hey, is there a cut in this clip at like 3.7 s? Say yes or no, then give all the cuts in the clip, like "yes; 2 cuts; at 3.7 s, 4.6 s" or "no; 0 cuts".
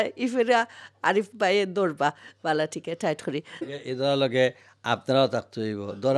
yes; 1 cut; at 3.7 s